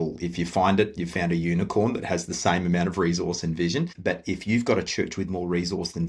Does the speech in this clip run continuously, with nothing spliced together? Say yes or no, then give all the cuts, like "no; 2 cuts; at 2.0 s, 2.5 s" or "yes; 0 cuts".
no; 1 cut; at 4.0 s